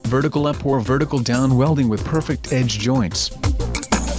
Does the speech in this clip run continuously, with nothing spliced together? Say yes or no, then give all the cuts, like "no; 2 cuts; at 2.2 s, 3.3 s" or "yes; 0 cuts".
no; 2 cuts; at 1.7 s, 3.3 s